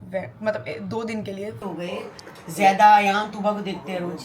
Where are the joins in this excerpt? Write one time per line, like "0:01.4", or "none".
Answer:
0:01.6